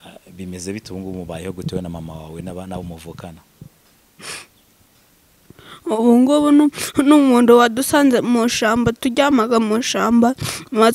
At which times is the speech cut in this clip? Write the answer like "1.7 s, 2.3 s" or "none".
none